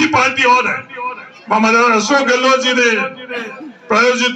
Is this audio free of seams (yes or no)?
yes